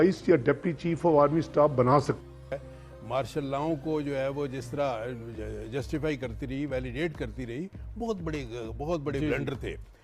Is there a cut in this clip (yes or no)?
yes